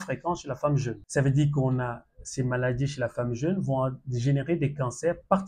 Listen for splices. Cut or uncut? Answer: cut